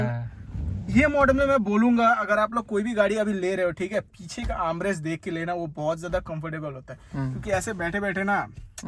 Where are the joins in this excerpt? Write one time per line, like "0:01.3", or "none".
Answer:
none